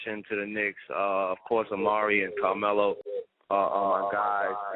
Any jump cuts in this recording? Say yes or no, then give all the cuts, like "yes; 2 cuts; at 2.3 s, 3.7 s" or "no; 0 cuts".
no; 0 cuts